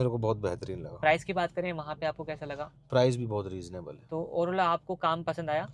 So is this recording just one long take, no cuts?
yes; 0 cuts

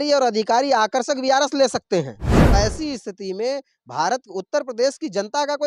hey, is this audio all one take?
no; 1 cut; at 2.5 s

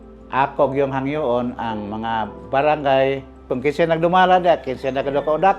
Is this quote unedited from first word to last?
no; 1 cut; at 3.5 s

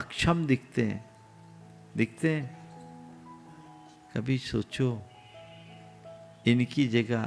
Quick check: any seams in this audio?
no; 0 cuts

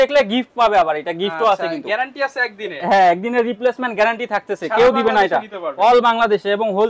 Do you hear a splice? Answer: no; 0 cuts

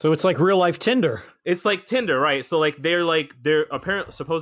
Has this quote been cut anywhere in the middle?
yes; 1 cut; at 1.3 s

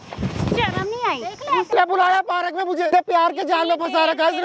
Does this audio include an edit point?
yes; 2 cuts; at 1.7 s, 2.9 s

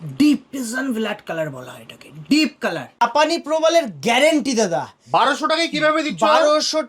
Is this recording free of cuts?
no; 1 cut; at 2.9 s

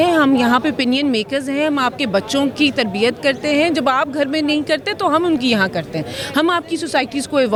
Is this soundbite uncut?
yes; 0 cuts

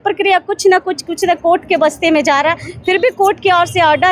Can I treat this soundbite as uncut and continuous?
yes; 0 cuts

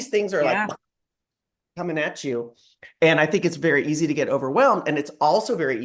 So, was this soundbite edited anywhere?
no; 0 cuts

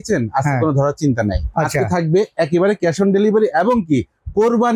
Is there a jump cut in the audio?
no; 0 cuts

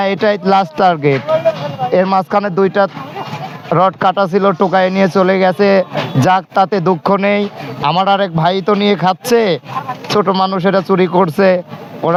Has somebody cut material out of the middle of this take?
no; 0 cuts

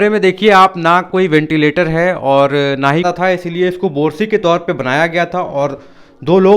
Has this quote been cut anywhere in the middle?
yes; 1 cut; at 3.0 s

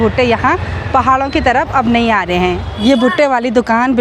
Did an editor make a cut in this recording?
no; 0 cuts

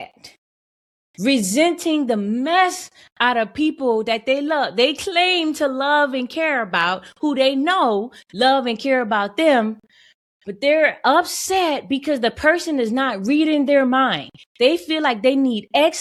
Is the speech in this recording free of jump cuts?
yes; 0 cuts

